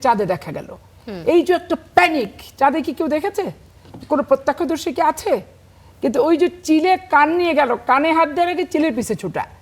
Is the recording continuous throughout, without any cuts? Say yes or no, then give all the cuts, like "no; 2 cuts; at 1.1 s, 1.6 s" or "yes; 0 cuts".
yes; 0 cuts